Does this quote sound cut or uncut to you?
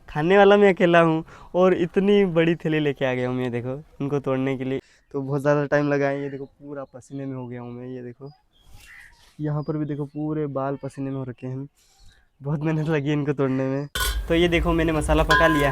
cut